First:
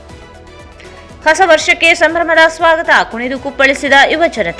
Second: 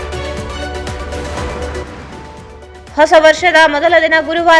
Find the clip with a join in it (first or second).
second